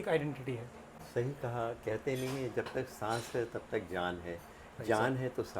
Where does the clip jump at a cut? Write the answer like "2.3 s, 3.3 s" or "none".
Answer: 1.0 s